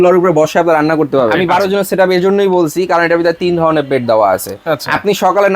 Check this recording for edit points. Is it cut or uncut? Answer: cut